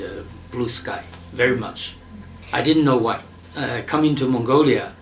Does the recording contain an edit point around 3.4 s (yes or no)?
yes